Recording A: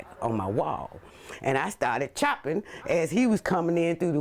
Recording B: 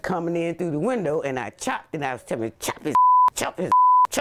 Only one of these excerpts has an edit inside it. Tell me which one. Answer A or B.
A